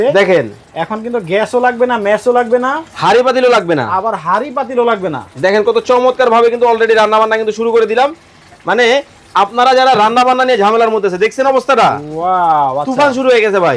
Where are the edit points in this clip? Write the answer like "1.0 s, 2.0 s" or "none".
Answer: none